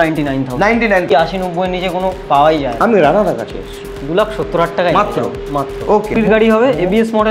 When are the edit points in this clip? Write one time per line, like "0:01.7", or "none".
0:01.1
0:06.1